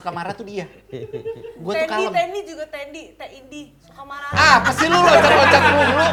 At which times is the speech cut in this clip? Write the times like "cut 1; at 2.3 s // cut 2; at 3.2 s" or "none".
none